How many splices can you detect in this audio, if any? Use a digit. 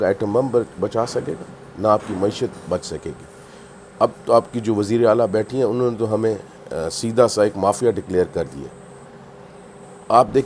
0